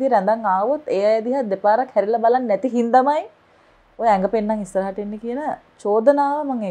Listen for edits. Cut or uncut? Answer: uncut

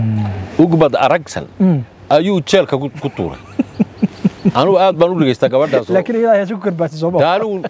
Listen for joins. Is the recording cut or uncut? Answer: uncut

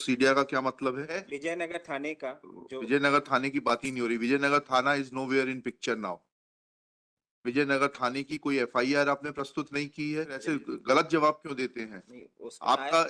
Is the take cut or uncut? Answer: cut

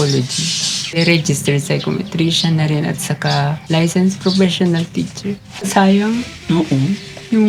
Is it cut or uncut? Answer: cut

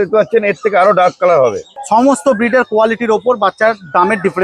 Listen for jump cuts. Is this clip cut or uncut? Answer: cut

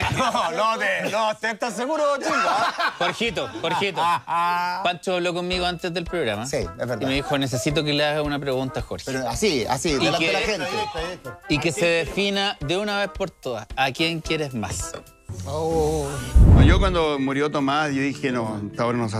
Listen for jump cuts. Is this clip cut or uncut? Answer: cut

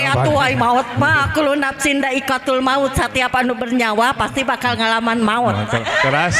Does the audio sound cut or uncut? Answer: uncut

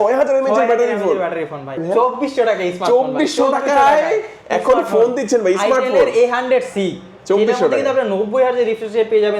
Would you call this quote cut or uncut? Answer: cut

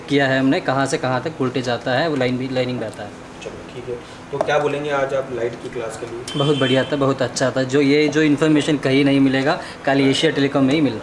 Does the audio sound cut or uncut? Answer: uncut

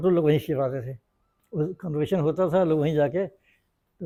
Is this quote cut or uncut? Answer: uncut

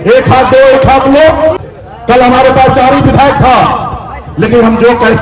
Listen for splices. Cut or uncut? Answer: cut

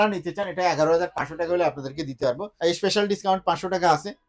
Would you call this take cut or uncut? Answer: cut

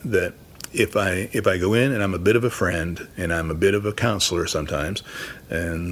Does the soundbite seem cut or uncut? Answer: uncut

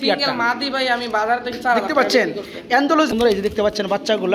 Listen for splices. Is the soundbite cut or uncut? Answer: cut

